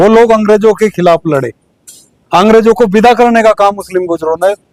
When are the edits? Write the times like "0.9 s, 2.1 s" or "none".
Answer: none